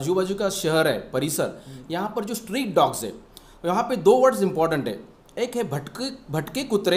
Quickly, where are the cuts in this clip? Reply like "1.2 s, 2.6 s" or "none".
none